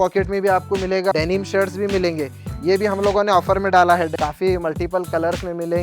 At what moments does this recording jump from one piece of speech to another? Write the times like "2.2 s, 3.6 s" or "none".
1.1 s, 4.1 s